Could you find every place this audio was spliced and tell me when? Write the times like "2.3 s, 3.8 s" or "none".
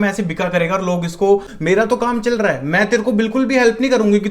1.5 s